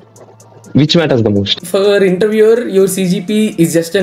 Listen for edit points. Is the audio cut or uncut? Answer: cut